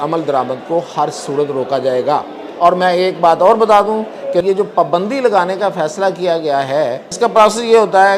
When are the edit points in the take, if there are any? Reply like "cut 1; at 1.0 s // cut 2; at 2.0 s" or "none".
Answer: cut 1; at 4.4 s // cut 2; at 7.1 s